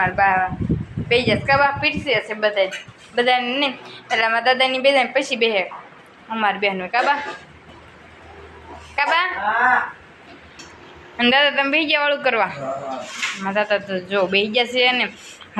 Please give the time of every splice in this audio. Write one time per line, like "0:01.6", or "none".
none